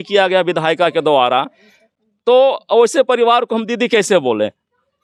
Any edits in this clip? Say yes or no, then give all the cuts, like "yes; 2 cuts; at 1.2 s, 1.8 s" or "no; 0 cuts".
no; 0 cuts